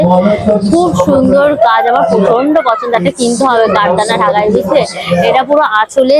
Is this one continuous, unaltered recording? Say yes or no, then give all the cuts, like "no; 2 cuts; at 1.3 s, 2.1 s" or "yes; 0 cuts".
yes; 0 cuts